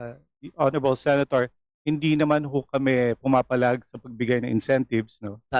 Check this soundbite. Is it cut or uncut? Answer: uncut